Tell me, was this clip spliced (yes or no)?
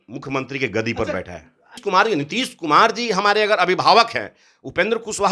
yes